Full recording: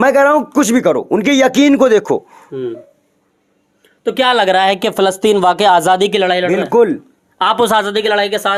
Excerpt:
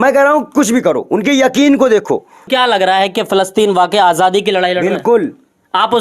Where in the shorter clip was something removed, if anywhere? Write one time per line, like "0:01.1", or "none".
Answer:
0:02.5